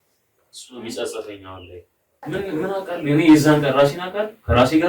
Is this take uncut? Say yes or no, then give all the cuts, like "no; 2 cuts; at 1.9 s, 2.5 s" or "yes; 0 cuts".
no; 1 cut; at 2.1 s